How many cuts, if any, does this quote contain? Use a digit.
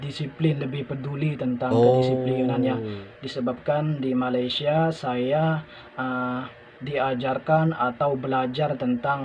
0